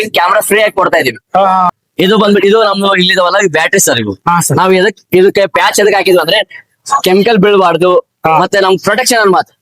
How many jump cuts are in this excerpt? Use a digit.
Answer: 1